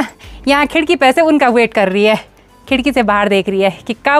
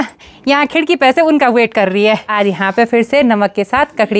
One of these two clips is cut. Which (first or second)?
second